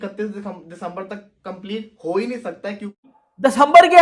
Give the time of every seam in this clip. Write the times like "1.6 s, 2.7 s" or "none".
3.0 s

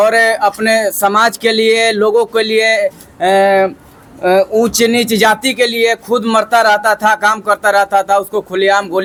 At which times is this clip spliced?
none

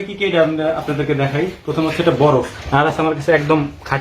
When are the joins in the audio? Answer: 2.6 s

